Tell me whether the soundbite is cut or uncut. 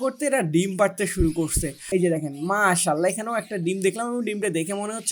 cut